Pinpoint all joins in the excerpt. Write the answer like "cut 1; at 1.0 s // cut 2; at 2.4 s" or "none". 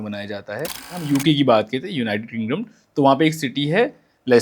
cut 1; at 1.1 s